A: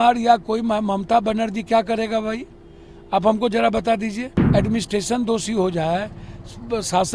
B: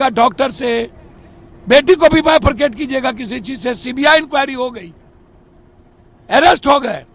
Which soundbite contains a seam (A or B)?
A